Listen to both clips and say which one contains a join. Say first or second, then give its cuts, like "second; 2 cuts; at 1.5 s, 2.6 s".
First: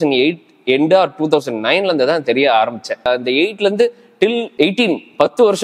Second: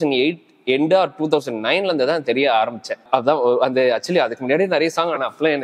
first; 1 cut; at 3.1 s